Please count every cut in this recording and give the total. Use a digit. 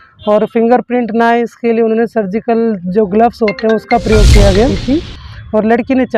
1